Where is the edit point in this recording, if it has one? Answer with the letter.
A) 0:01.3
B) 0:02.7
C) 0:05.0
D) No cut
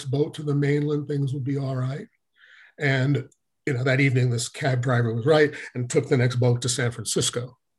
D